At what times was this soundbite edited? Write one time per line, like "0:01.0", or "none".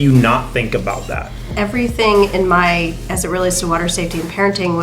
0:01.5